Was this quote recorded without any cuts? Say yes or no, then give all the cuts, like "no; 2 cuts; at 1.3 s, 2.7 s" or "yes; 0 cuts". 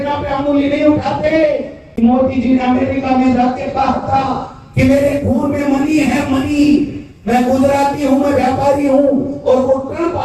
no; 1 cut; at 2.0 s